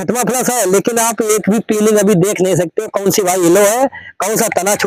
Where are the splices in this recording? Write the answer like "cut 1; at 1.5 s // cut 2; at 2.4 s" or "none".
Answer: none